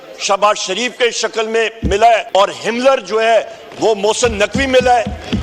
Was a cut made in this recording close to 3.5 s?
no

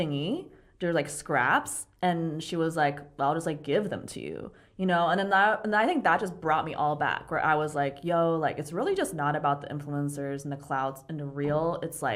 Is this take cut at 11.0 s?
no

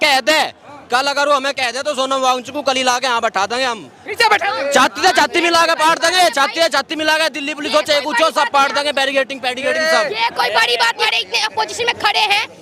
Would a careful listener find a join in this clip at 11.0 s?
yes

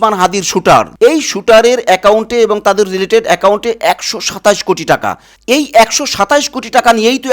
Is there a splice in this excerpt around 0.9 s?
yes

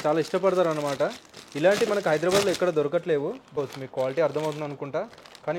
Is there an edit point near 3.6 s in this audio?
yes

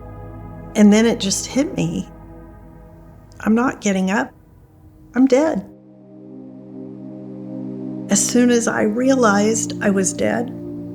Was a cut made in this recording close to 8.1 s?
yes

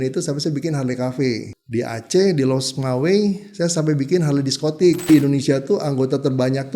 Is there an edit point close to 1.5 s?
yes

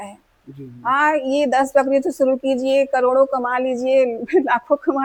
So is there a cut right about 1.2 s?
no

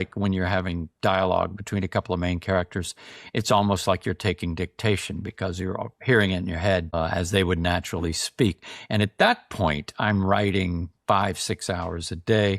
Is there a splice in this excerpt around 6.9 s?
yes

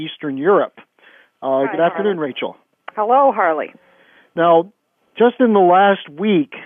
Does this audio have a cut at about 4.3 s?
no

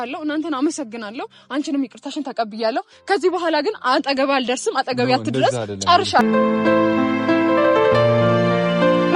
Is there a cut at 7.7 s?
no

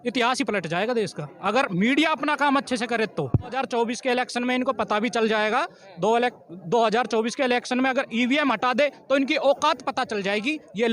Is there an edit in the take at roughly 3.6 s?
yes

